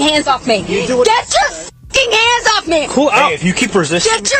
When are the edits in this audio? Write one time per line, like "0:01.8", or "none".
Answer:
none